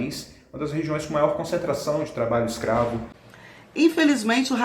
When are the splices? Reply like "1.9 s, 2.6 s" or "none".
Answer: 3.2 s